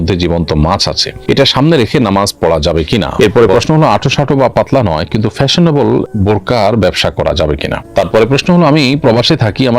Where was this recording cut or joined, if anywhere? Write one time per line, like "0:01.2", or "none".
0:03.1
0:07.8